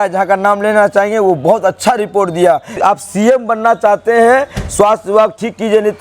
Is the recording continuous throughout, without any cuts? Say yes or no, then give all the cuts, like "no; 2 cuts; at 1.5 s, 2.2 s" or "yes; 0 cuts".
no; 1 cut; at 2.7 s